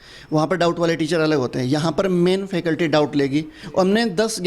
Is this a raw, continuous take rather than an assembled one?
no; 1 cut; at 3.6 s

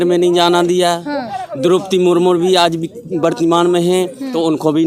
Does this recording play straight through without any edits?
yes; 0 cuts

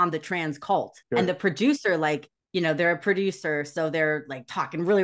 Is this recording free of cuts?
no; 2 cuts; at 1.0 s, 2.3 s

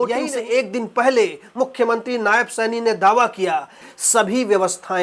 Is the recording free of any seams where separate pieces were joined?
no; 1 cut; at 3.9 s

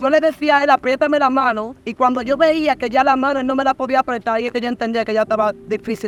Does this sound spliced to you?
no; 0 cuts

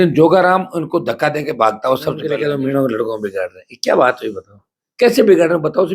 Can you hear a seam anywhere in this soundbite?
yes; 1 cut; at 2.3 s

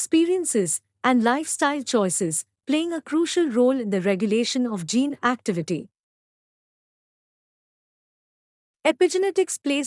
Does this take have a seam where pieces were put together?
no; 0 cuts

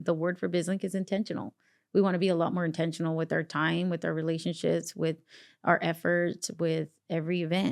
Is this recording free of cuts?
yes; 0 cuts

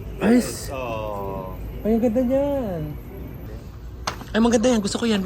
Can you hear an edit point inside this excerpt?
yes; 1 cut; at 3.3 s

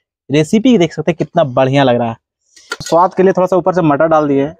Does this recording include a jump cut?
yes; 1 cut; at 2.8 s

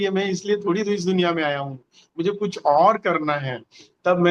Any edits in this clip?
no; 0 cuts

